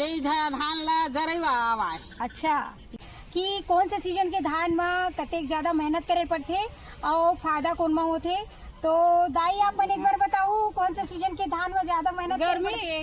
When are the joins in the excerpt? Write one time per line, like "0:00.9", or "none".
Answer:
0:03.0